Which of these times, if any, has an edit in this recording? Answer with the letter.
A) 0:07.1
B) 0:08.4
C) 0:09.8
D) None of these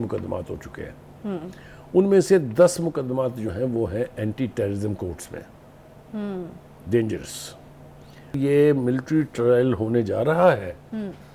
B